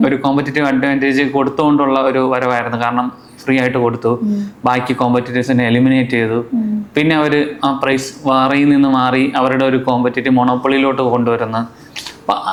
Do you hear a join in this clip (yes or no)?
no